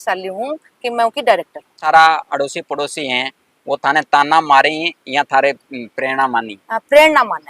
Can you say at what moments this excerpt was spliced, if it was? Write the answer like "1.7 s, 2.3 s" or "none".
1.8 s